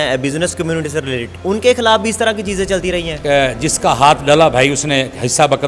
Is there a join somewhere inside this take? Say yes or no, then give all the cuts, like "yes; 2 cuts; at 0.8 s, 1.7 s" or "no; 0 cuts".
yes; 2 cuts; at 1.3 s, 3.2 s